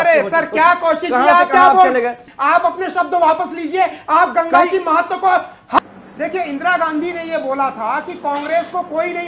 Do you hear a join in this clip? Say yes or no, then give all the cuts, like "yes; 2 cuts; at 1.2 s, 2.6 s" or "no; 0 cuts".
yes; 2 cuts; at 2.3 s, 5.8 s